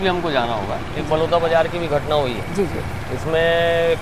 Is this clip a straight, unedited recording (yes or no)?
yes